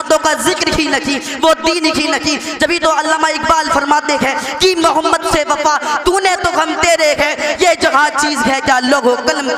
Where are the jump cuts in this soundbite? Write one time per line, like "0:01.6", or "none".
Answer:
none